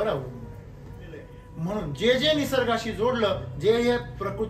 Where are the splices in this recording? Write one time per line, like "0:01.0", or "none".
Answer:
0:01.4